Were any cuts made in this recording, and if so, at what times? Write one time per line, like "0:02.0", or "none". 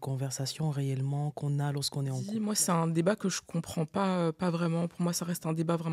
0:02.3